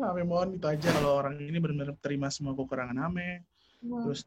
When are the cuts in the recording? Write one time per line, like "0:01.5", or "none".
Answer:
0:00.9